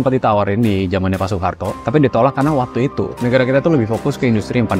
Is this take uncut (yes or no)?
yes